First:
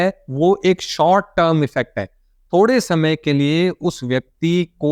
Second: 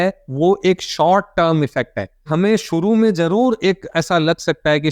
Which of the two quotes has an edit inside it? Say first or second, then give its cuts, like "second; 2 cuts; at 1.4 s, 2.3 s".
second; 1 cut; at 2.3 s